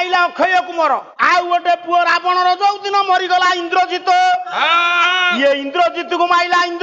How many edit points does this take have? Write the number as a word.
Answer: one